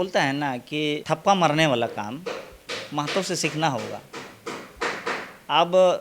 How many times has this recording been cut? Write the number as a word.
one